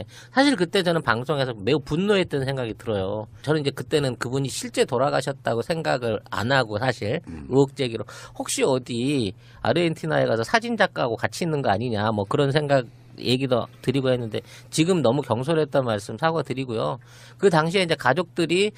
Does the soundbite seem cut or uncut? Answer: uncut